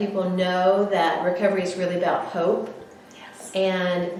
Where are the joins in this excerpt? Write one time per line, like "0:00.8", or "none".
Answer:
none

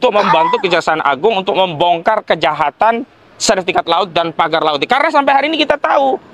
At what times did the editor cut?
none

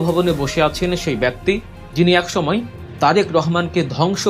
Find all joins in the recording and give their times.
0:01.8

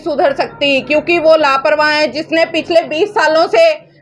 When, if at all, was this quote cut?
none

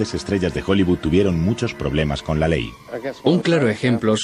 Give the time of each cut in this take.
none

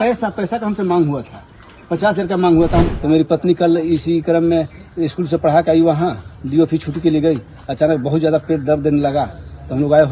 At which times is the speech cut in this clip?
0:02.9

